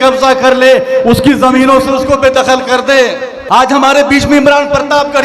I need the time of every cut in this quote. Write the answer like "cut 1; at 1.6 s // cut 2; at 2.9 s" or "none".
cut 1; at 3.3 s